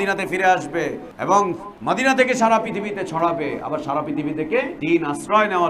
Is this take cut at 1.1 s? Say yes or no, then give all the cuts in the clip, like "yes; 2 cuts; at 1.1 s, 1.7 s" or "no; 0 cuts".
yes; 3 cuts; at 1.1 s, 1.7 s, 4.7 s